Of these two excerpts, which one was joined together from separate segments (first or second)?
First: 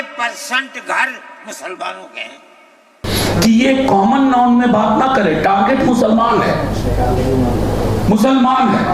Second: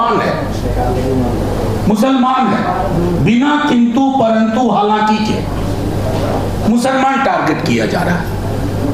first